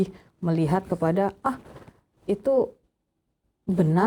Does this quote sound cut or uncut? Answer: uncut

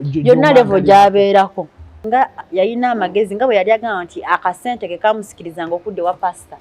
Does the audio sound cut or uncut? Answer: cut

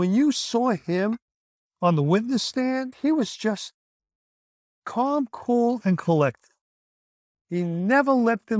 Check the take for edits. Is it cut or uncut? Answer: uncut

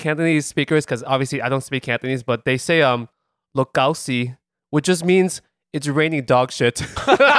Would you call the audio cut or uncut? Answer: uncut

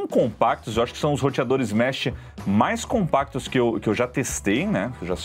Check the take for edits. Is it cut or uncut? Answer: uncut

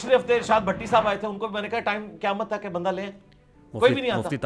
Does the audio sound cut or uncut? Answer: uncut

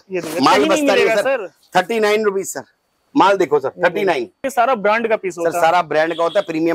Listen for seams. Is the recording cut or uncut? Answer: cut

